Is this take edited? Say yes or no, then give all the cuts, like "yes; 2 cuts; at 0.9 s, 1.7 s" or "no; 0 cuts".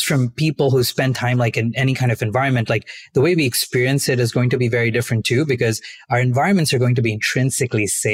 no; 0 cuts